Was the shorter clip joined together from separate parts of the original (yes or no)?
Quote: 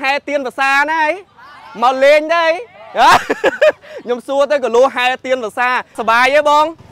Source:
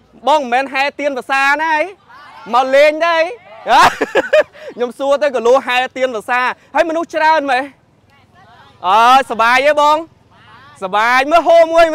yes